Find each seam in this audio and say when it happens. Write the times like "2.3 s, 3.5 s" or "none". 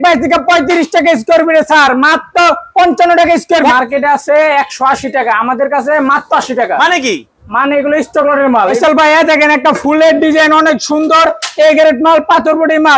3.6 s, 8.6 s